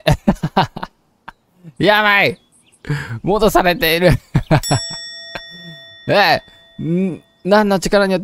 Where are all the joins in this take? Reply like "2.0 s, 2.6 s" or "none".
none